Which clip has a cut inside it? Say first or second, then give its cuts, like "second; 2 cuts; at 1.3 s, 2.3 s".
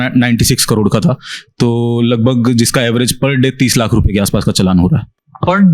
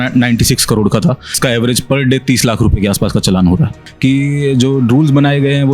second; 2 cuts; at 1.4 s, 3.9 s